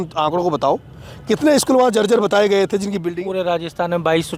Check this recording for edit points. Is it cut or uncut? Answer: uncut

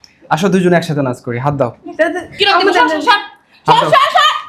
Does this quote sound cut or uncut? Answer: uncut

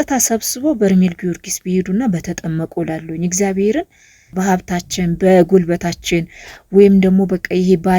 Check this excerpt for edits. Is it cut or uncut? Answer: cut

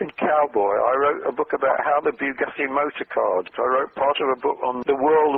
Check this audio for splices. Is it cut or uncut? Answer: cut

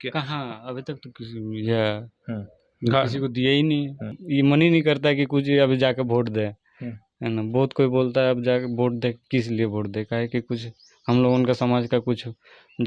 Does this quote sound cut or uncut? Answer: cut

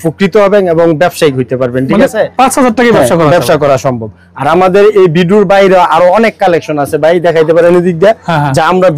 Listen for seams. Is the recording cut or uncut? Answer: uncut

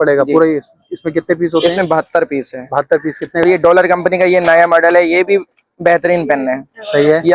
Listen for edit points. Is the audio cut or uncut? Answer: cut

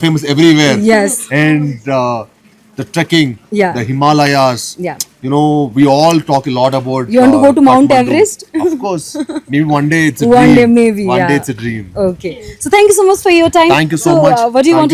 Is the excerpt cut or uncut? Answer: uncut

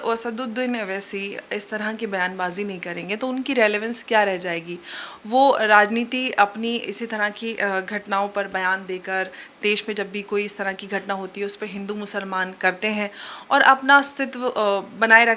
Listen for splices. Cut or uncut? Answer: uncut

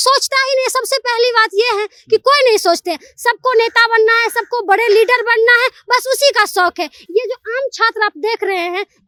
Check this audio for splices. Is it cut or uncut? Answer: uncut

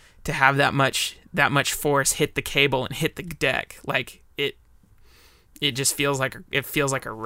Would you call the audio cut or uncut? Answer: uncut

